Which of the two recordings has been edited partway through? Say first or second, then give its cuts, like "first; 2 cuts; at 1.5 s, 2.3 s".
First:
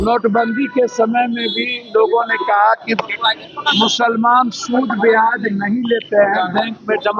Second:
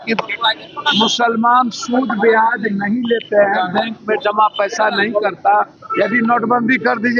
second; 1 cut; at 5.8 s